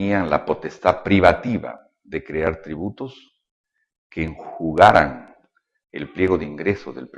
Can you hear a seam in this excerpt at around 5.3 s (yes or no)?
no